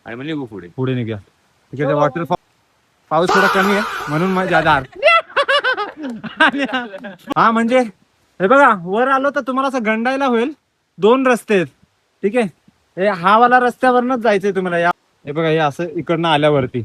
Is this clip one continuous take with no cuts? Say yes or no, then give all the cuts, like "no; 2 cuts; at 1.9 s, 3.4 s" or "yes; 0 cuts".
no; 3 cuts; at 2.4 s, 7.2 s, 14.9 s